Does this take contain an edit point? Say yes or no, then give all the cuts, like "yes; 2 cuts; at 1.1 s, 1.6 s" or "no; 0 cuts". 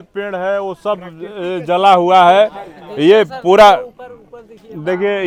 no; 0 cuts